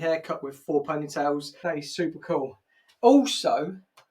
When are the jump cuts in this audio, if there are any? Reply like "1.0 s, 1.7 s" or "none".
1.5 s